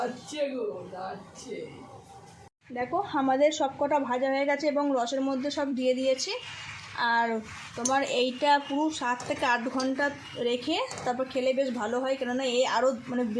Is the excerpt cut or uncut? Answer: cut